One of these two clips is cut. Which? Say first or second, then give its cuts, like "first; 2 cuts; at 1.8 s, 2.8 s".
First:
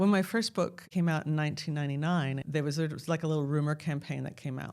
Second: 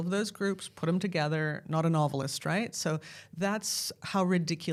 first; 2 cuts; at 0.9 s, 2.4 s